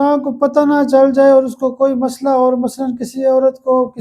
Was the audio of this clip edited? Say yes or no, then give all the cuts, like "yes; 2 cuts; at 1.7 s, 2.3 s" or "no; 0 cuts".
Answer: no; 0 cuts